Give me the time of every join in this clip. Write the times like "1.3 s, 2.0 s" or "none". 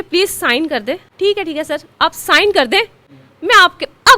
1.1 s